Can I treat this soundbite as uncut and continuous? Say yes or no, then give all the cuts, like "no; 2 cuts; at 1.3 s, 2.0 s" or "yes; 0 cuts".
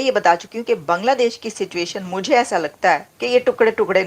no; 1 cut; at 3.1 s